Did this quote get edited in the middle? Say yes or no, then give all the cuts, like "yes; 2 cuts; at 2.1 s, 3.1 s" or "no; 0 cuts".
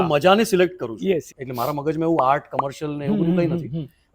yes; 1 cut; at 1.4 s